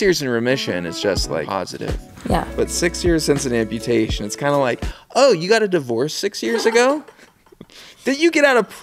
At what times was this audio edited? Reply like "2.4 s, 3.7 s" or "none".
1.5 s